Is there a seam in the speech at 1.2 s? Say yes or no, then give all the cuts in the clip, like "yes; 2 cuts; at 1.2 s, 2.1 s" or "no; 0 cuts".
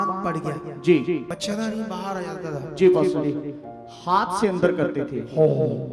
yes; 1 cut; at 1.2 s